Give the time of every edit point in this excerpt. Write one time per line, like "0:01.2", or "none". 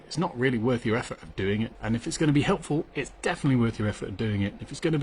0:01.8